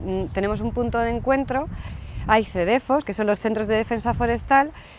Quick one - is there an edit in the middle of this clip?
no; 0 cuts

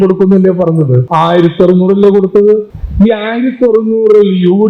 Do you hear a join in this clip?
yes; 2 cuts; at 1.0 s, 2.8 s

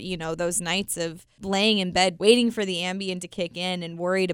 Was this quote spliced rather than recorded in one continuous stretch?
yes; 2 cuts; at 1.3 s, 2.2 s

